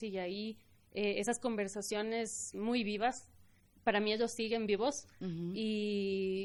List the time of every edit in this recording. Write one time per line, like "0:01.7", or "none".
none